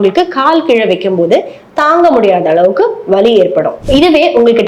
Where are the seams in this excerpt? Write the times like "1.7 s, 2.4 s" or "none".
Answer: 3.8 s